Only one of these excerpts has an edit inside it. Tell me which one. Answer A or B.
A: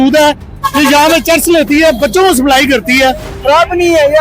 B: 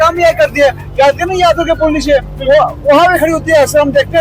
A